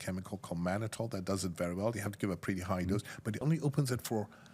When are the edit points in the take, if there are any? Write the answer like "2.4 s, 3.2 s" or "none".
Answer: 3.4 s